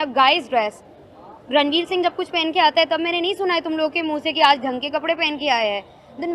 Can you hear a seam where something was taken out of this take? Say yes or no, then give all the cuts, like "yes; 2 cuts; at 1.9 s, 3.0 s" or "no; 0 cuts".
no; 0 cuts